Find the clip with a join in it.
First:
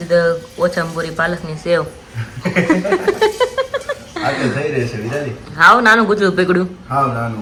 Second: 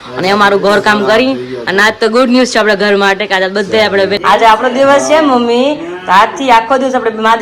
second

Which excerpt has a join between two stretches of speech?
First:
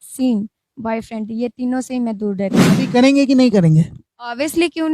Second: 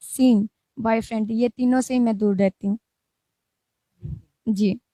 first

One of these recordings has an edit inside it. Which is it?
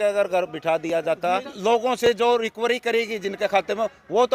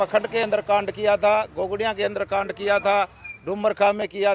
first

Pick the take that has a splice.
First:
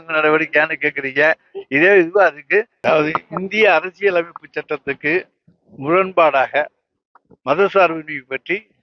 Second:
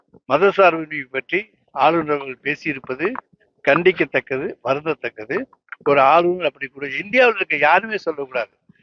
first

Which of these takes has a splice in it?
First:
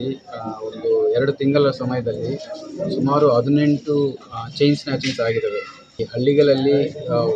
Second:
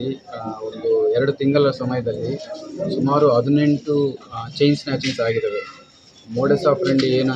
first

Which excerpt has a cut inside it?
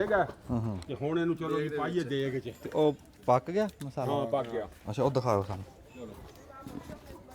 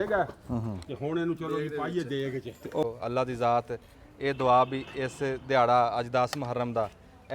second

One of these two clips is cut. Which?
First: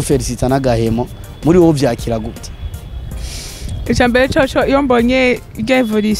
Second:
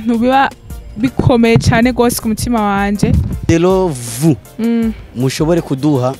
second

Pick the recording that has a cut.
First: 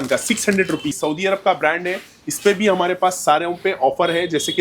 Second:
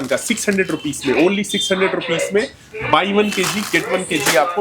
first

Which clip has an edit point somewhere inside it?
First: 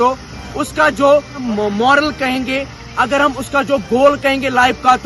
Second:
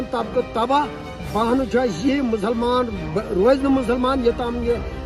first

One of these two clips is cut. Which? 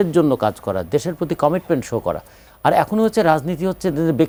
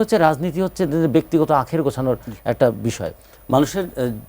second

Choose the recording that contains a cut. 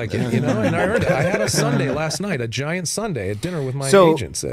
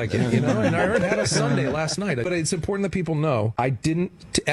second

